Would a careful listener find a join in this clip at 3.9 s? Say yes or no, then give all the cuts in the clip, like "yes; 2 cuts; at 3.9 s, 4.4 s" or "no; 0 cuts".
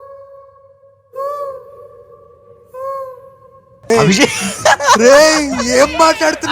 yes; 1 cut; at 3.9 s